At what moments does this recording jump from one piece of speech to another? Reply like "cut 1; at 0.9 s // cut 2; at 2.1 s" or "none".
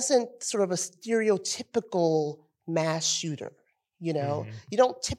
none